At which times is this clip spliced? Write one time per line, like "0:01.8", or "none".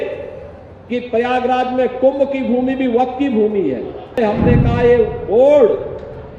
0:04.2